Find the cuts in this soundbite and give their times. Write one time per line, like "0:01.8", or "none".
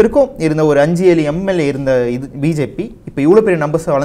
none

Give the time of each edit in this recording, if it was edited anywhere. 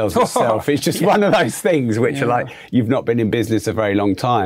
none

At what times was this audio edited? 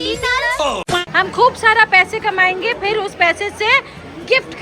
0:01.1

